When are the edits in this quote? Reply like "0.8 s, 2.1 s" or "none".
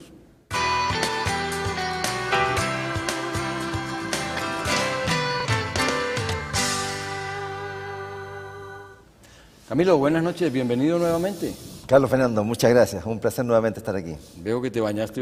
none

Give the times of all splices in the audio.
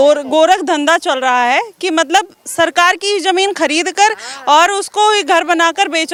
none

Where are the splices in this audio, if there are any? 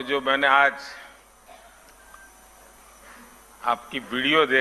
3.2 s

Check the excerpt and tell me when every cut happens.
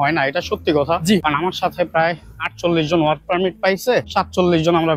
1.2 s, 4.1 s

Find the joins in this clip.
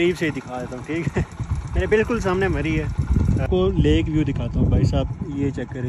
3.5 s

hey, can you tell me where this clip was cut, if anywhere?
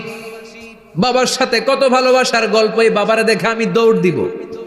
none

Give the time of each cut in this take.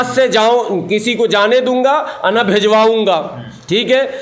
none

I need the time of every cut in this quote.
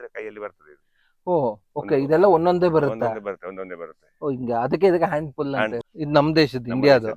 5.9 s

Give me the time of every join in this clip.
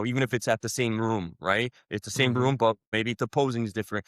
2.9 s

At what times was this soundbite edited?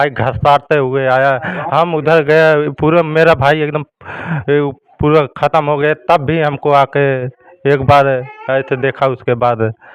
none

